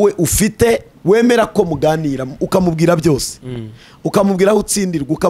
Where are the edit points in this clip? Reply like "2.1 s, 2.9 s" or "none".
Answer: 0.9 s